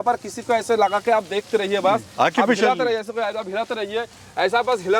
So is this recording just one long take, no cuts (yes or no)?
yes